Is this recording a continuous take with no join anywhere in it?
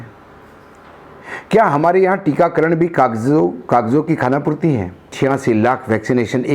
no; 1 cut; at 5.1 s

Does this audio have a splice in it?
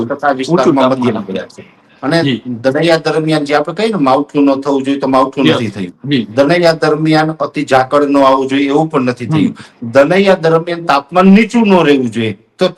no; 0 cuts

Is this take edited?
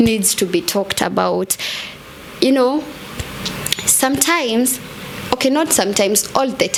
no; 0 cuts

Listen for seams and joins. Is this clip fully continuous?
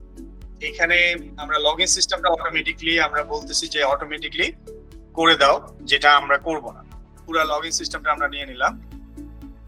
no; 1 cut; at 1.4 s

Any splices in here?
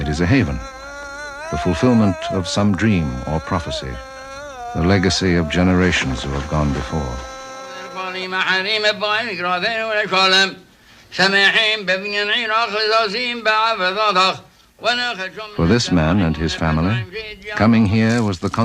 yes; 1 cut; at 16.9 s

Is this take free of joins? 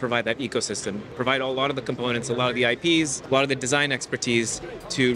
no; 2 cuts; at 1.1 s, 3.2 s

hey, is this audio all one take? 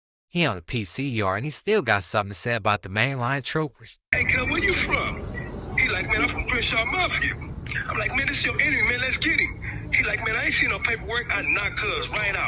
no; 1 cut; at 4.1 s

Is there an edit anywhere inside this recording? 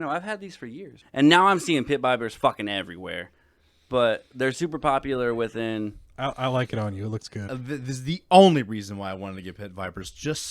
yes; 2 cuts; at 1.0 s, 7.5 s

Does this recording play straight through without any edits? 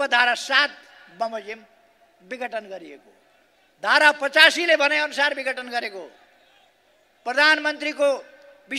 yes; 0 cuts

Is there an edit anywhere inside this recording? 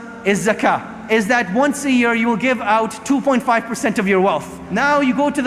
yes; 2 cuts; at 0.9 s, 4.7 s

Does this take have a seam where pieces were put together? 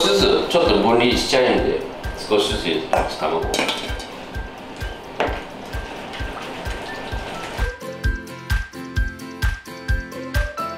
no; 0 cuts

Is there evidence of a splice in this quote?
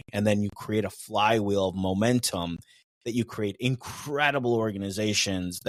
no; 0 cuts

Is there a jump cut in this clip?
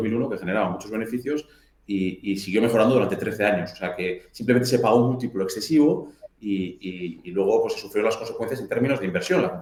no; 0 cuts

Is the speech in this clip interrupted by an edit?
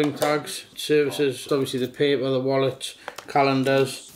yes; 1 cut; at 1.4 s

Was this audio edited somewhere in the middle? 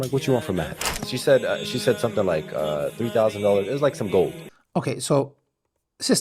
no; 0 cuts

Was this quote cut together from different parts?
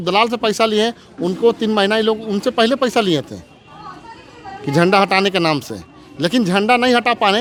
no; 0 cuts

